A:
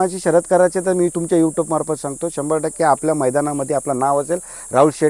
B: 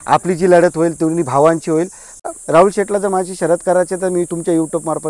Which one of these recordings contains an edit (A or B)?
B